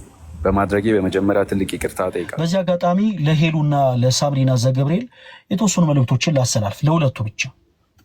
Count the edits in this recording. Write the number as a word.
one